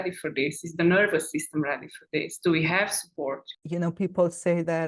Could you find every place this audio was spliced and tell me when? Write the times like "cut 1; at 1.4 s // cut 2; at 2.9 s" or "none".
cut 1; at 3.5 s